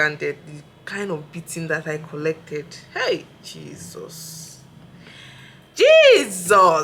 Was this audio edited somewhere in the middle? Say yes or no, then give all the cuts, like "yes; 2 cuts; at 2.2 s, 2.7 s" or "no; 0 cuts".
no; 0 cuts